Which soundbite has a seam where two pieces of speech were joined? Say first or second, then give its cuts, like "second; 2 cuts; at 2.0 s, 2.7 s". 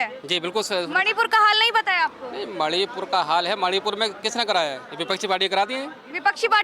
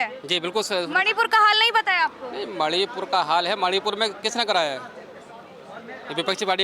first; 1 cut; at 4.9 s